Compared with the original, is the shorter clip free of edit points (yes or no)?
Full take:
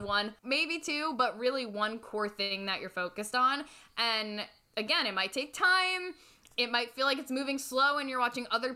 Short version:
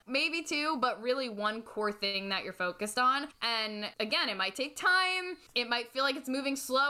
no